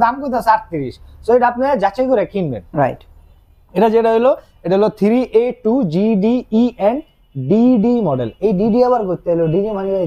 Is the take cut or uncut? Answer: uncut